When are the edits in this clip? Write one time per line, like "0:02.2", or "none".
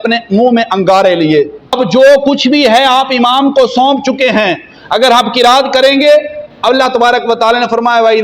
0:01.8